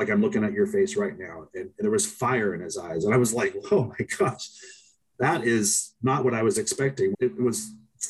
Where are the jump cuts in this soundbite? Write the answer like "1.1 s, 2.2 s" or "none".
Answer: 7.1 s